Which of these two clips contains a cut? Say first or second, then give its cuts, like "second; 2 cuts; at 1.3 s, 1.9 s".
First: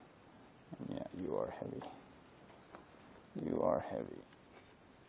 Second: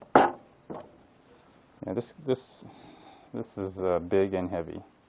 second; 1 cut; at 3.5 s